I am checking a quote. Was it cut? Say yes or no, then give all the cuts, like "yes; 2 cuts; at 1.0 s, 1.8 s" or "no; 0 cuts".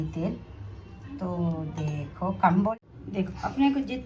yes; 1 cut; at 2.7 s